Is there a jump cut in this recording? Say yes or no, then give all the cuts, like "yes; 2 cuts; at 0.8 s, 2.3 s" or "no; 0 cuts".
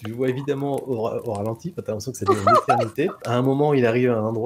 yes; 1 cut; at 3.3 s